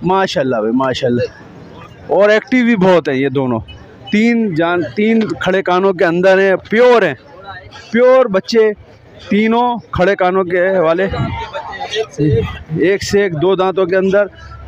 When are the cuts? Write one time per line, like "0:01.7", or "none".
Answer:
none